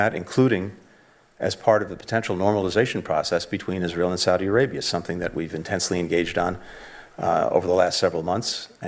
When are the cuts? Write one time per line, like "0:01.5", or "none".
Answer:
none